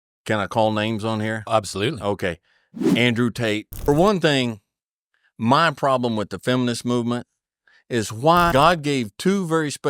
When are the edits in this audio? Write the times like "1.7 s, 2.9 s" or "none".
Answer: 3.9 s, 8.5 s